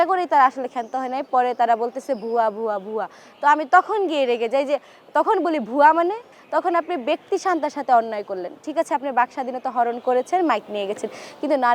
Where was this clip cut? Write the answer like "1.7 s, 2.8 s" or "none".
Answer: 6.3 s